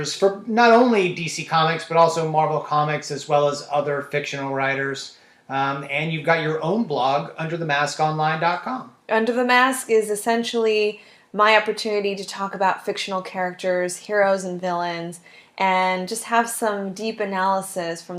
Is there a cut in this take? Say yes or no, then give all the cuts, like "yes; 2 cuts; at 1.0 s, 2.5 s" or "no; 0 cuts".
no; 0 cuts